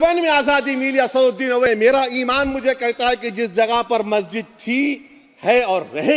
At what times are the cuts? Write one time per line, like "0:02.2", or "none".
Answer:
0:01.7